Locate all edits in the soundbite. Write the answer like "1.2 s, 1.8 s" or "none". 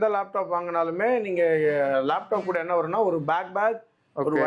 none